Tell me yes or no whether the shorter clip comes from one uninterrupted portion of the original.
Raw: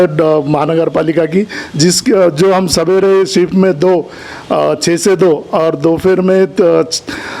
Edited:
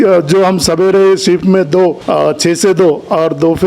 no